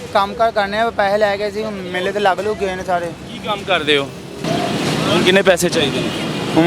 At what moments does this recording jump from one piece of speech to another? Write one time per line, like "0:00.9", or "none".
0:04.4